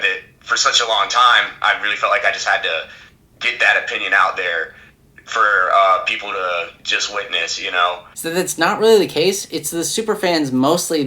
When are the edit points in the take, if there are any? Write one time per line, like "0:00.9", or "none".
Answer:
0:08.1